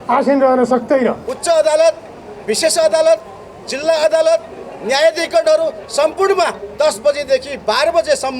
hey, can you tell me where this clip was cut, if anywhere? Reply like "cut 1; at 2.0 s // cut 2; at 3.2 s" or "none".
cut 1; at 1.3 s